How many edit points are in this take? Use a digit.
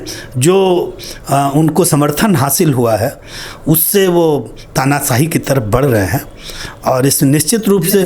0